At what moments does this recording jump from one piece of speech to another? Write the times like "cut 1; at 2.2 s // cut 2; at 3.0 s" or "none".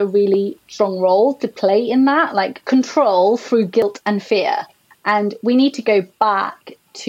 cut 1; at 2.6 s // cut 2; at 3.8 s